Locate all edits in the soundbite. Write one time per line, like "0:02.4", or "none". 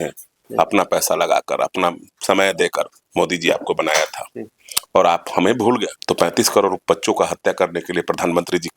0:05.9